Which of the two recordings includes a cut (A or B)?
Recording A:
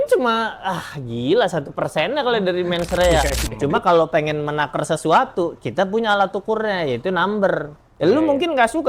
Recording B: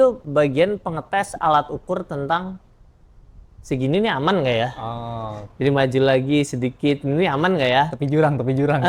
A